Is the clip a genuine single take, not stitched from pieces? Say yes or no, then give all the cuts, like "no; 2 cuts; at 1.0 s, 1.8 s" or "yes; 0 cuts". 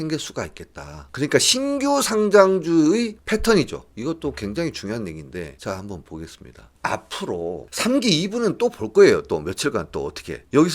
yes; 0 cuts